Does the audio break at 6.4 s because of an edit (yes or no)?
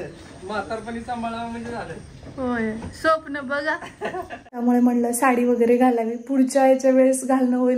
no